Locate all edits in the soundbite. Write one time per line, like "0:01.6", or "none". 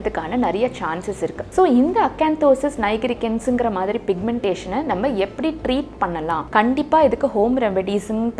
0:01.4
0:06.4